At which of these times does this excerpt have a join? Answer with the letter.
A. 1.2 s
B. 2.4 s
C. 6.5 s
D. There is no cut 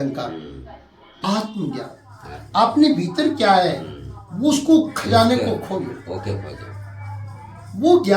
A